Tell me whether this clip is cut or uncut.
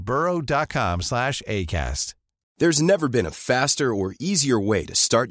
cut